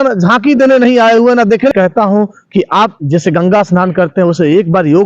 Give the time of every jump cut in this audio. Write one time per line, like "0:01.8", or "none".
0:01.7